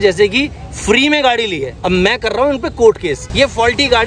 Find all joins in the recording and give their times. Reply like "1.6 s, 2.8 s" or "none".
1.7 s, 3.2 s

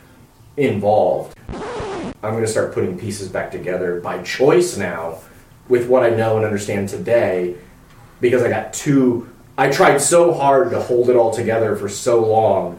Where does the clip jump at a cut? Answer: 1.6 s

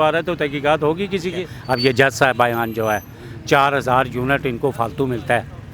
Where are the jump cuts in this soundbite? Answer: 1.5 s

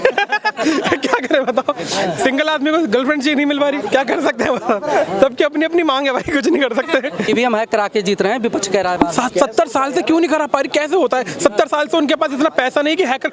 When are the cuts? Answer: 7.2 s

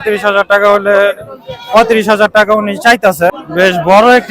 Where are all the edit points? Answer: 3.3 s

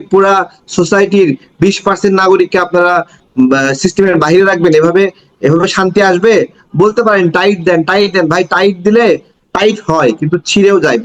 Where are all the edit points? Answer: none

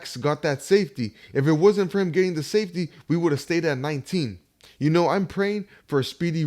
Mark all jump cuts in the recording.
4.6 s

